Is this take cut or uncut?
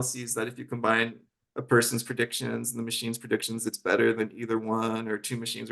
uncut